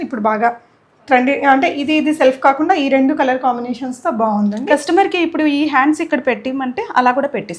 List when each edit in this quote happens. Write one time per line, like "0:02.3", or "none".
none